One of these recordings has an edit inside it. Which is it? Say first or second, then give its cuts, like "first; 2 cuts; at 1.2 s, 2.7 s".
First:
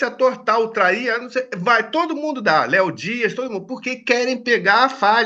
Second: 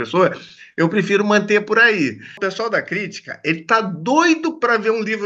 second; 1 cut; at 2.4 s